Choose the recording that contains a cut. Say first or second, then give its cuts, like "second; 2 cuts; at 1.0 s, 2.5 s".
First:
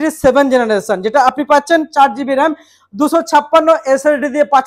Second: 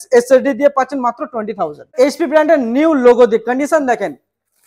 second; 1 cut; at 1.9 s